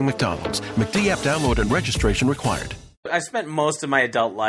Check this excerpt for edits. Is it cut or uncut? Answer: cut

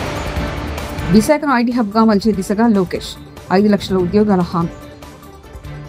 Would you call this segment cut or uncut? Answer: cut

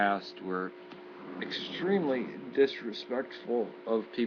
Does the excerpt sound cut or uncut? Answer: uncut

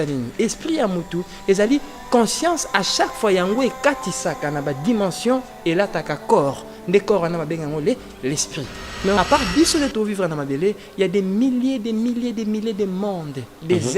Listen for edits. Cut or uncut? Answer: cut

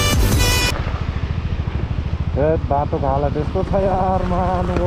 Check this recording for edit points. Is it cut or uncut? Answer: uncut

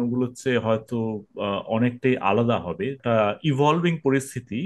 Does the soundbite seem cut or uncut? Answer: cut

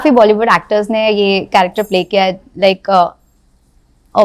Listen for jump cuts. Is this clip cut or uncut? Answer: uncut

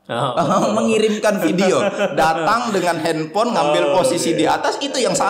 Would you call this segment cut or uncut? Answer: uncut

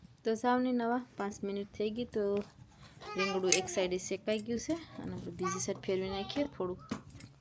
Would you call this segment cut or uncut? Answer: uncut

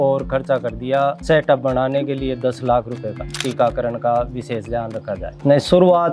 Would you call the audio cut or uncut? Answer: cut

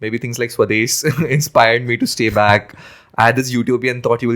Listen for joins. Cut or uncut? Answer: uncut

